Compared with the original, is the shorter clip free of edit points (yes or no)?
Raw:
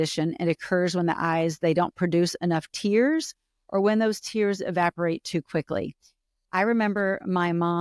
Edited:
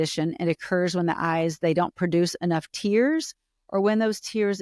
yes